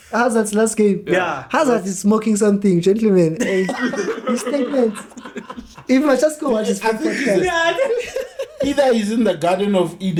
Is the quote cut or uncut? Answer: uncut